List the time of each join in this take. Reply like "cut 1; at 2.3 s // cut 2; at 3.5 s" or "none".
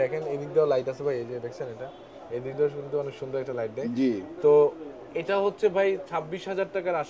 none